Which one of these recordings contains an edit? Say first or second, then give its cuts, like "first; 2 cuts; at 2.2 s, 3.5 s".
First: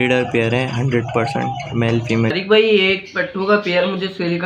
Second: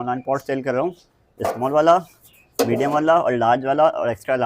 first; 1 cut; at 2.3 s